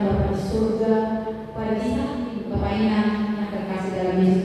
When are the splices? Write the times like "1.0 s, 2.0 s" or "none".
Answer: 2.4 s